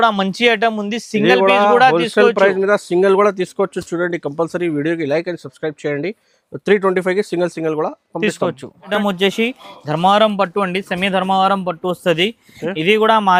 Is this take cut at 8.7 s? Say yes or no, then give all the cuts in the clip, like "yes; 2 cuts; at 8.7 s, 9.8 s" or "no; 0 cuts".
no; 0 cuts